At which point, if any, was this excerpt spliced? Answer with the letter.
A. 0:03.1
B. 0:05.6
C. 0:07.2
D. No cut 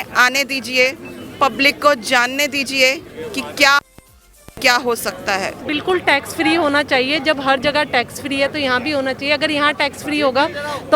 B